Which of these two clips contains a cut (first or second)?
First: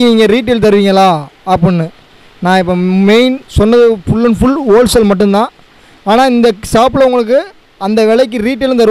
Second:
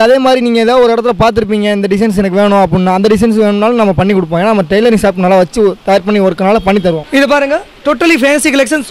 second